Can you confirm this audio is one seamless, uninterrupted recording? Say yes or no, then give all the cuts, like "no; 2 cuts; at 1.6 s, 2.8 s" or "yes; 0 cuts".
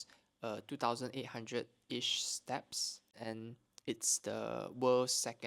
no; 1 cut; at 3.2 s